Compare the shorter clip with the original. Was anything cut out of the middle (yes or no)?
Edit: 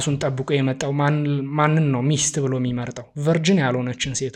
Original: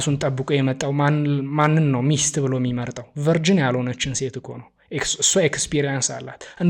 no